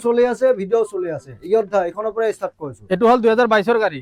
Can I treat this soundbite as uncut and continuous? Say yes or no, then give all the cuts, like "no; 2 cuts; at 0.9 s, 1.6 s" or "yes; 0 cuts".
yes; 0 cuts